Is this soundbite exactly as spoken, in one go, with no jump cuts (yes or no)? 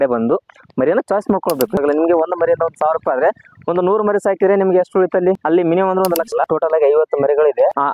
no